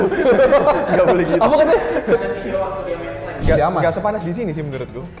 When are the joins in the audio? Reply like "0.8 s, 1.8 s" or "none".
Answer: 3.3 s